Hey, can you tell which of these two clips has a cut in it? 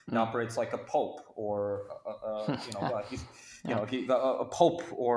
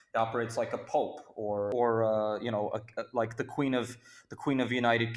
second; 1 cut; at 1.7 s

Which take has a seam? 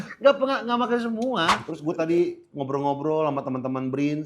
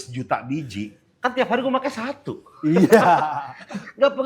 first; 1 cut; at 1.7 s

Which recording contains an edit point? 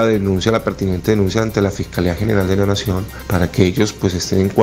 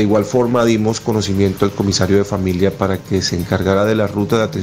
first; 1 cut; at 3.1 s

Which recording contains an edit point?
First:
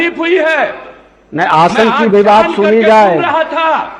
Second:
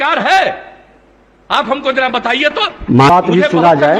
second; 1 cut; at 3.1 s

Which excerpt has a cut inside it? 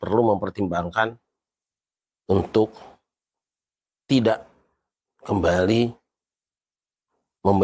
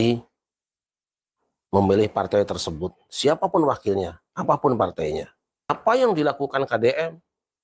second; 1 cut; at 5.7 s

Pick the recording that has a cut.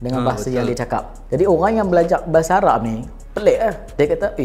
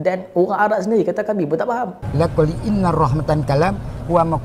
second; 1 cut; at 2.0 s

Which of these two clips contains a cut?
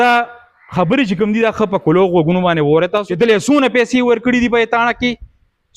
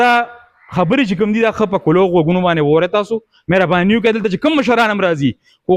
first; 1 cut; at 3.1 s

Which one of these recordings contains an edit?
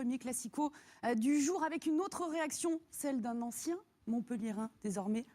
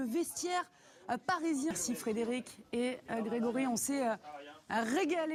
first; 1 cut; at 2.6 s

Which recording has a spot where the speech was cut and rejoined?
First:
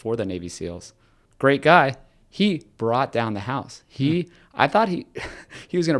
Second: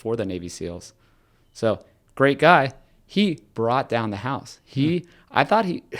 first; 1 cut; at 1.2 s

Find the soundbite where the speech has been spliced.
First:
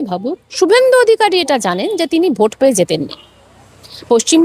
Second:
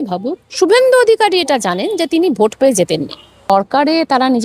second; 1 cut; at 3.4 s

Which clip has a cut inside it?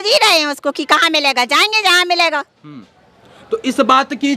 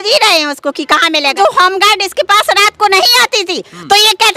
second; 1 cut; at 1.4 s

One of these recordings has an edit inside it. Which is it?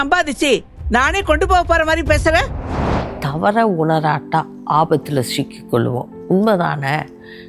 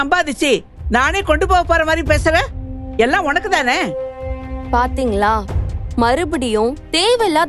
first; 1 cut; at 2.8 s

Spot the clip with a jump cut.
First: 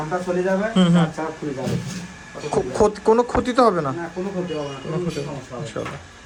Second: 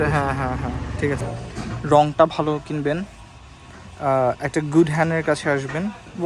second; 1 cut; at 1.3 s

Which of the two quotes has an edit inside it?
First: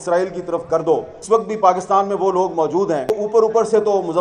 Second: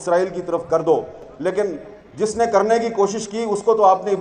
first; 2 cuts; at 1.2 s, 3.2 s

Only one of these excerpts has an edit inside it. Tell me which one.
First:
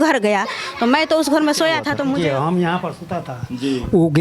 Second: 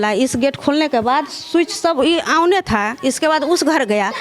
first; 1 cut; at 2.1 s

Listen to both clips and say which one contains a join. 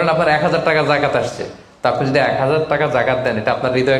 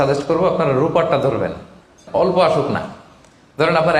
second; 1 cut; at 2.0 s

